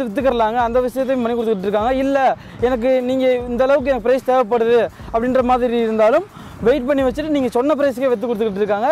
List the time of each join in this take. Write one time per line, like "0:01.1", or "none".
none